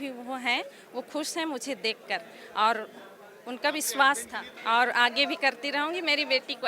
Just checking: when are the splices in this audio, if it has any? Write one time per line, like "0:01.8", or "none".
none